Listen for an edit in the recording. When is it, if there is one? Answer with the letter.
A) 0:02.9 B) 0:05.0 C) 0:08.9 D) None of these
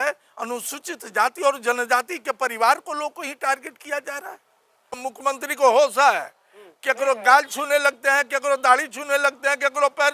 B